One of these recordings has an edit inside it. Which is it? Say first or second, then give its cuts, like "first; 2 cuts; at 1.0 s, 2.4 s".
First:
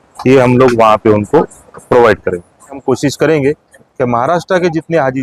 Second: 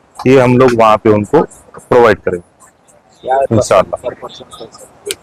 first; 1 cut; at 2.8 s